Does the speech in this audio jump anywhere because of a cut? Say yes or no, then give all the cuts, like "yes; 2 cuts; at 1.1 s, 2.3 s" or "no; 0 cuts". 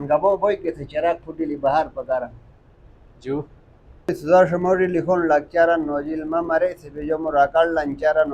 yes; 1 cut; at 4.1 s